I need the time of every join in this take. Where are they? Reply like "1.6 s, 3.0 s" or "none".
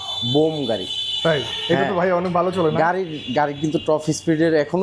none